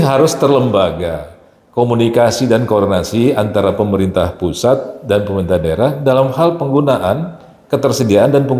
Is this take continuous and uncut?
yes; 0 cuts

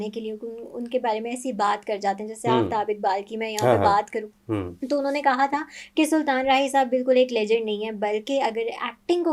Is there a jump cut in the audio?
no; 0 cuts

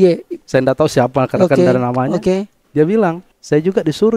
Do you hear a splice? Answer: yes; 1 cut; at 3.2 s

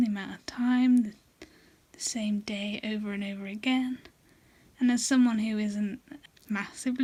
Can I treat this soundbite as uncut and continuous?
yes; 0 cuts

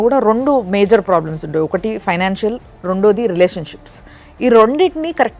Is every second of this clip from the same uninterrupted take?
yes; 0 cuts

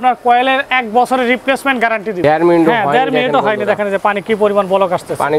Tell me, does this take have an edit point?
yes; 1 cut; at 2.2 s

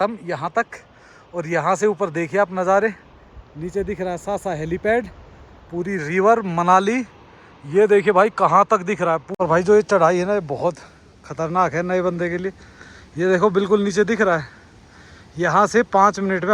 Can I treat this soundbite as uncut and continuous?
no; 1 cut; at 9.3 s

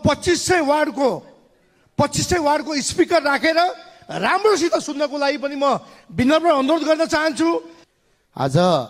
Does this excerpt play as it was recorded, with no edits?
no; 1 cut; at 7.8 s

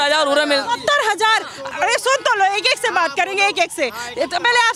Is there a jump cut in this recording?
no; 0 cuts

